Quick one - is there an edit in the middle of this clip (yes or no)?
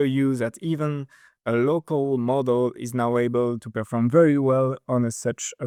no